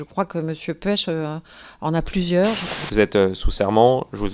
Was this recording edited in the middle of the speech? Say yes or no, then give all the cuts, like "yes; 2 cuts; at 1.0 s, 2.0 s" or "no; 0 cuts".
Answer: yes; 1 cut; at 2.7 s